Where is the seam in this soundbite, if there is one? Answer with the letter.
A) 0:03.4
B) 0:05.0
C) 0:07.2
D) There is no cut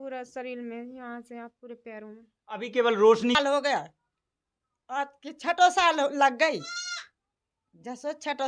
A